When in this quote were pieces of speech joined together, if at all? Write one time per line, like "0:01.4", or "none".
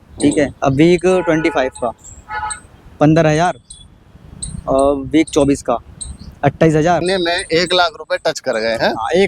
0:07.0